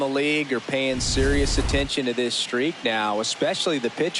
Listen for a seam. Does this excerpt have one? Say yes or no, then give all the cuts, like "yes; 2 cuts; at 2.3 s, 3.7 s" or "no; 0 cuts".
no; 0 cuts